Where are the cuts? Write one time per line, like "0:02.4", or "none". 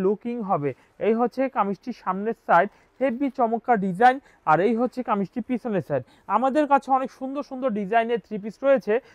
none